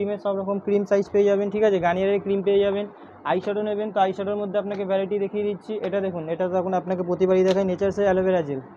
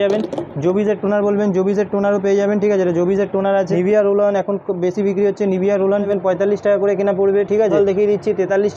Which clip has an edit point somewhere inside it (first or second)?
second